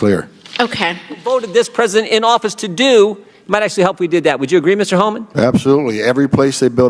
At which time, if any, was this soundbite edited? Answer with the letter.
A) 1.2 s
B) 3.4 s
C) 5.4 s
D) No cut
A